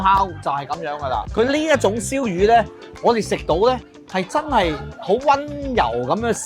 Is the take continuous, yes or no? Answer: no